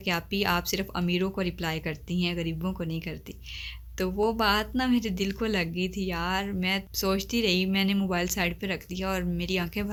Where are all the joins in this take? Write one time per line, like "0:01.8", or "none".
none